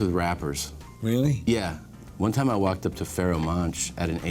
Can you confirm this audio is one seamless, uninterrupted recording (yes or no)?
no